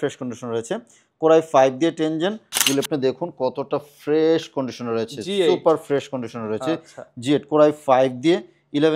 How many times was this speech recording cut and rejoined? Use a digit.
1